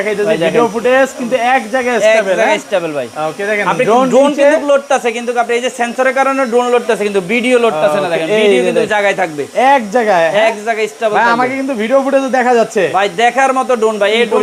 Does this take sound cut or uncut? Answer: uncut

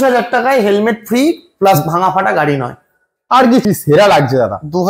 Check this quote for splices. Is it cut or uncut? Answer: cut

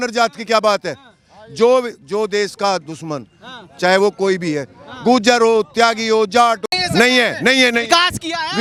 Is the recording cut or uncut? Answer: uncut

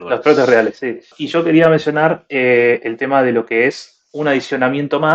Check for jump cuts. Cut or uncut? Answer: cut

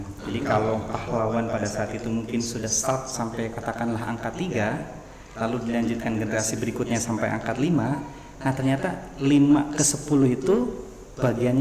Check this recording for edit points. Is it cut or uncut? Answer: uncut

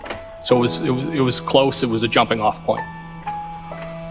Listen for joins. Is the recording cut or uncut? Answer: uncut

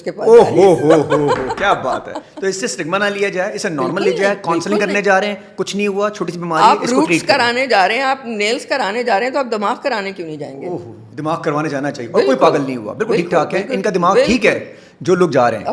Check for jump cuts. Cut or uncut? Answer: uncut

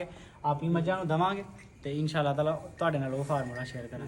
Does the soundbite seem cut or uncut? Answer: uncut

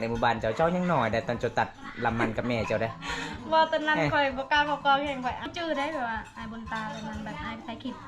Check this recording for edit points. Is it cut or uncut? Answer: cut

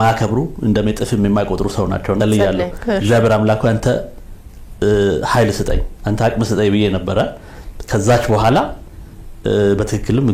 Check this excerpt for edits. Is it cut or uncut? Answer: cut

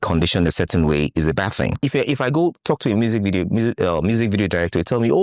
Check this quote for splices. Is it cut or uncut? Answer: cut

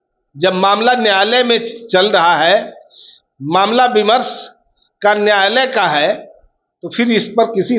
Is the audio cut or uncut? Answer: uncut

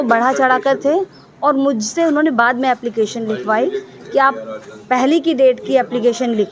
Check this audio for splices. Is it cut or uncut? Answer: uncut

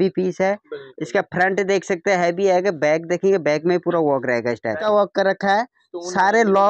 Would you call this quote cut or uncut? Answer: cut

